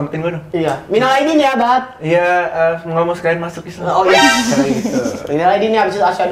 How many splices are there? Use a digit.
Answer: 0